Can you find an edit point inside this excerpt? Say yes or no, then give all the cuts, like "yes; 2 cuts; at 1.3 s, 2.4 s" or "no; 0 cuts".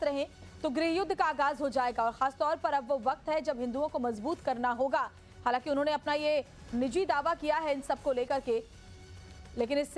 no; 0 cuts